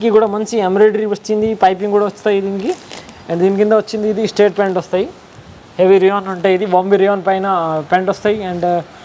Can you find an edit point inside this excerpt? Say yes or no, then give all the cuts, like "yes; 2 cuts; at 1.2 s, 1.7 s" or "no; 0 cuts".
no; 0 cuts